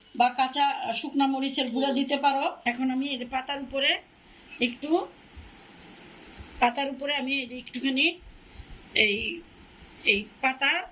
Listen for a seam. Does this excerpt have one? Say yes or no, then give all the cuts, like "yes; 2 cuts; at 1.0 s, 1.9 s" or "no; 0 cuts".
yes; 1 cut; at 2.6 s